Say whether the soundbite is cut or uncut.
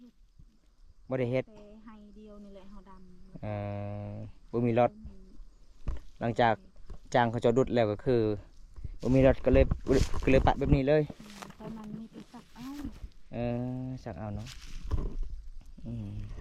uncut